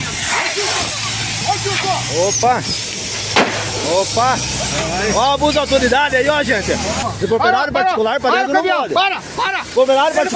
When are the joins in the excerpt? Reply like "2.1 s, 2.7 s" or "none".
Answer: 7.0 s